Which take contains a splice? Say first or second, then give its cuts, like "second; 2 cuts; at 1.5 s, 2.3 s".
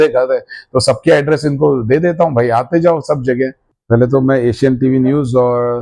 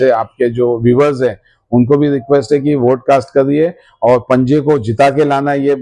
first; 1 cut; at 3.6 s